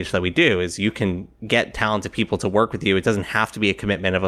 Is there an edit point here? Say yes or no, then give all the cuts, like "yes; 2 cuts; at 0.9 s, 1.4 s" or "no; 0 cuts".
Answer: no; 0 cuts